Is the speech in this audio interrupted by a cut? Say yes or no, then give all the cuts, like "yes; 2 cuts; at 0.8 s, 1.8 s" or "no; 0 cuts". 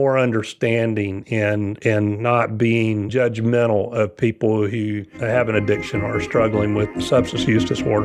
yes; 2 cuts; at 5.1 s, 6.9 s